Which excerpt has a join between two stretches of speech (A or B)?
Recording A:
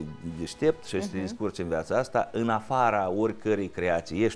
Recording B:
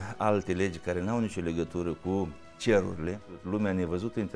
B